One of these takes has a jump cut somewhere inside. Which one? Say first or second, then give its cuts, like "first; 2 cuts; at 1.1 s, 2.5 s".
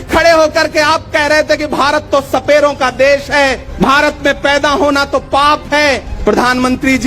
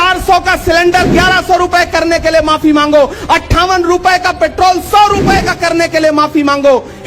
first; 2 cuts; at 3.6 s, 6.1 s